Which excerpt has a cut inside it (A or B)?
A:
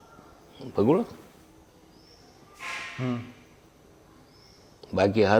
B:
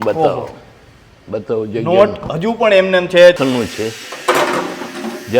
B